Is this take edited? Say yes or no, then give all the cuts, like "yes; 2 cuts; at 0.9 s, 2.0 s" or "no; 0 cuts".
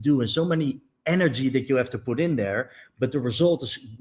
no; 0 cuts